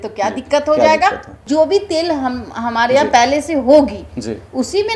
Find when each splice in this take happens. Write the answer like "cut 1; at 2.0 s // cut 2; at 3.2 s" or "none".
none